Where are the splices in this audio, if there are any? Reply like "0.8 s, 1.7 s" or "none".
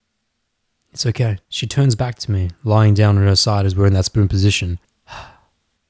1.5 s, 4.9 s